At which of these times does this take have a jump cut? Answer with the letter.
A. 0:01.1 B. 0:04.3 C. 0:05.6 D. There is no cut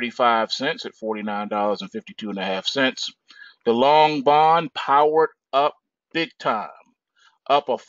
B